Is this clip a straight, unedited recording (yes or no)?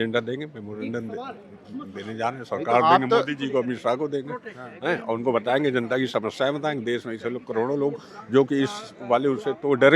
yes